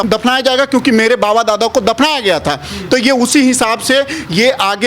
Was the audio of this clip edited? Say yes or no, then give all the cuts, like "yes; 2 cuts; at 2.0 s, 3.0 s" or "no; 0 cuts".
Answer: no; 0 cuts